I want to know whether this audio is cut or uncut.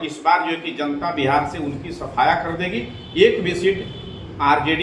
uncut